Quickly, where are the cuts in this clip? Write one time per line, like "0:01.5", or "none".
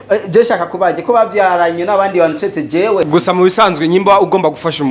0:03.1